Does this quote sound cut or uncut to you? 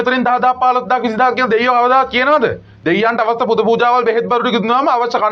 uncut